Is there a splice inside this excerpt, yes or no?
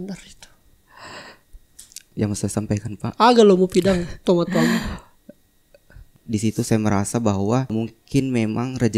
yes